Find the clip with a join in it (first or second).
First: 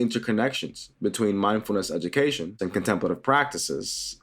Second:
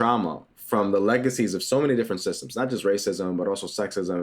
first